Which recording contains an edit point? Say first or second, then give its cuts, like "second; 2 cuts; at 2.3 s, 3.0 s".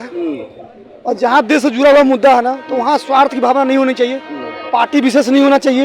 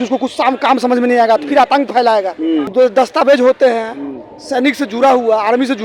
second; 1 cut; at 2.7 s